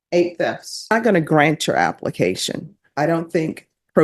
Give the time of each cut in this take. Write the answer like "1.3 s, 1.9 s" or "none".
0.9 s